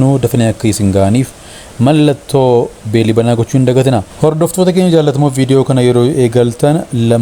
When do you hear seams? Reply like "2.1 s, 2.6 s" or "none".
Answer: 4.1 s